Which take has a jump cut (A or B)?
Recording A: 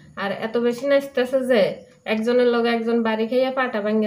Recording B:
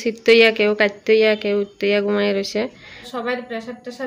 B